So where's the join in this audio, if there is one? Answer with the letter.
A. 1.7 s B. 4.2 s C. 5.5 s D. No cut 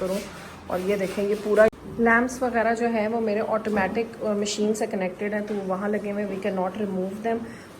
A